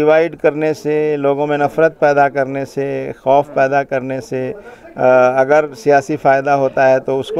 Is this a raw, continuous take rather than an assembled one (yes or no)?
yes